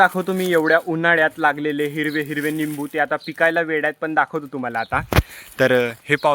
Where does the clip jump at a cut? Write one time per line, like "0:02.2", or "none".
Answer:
none